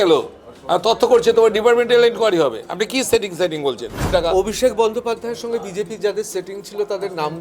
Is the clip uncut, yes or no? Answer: no